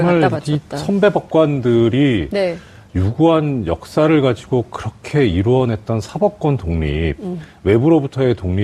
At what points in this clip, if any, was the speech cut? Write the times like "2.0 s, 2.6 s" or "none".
none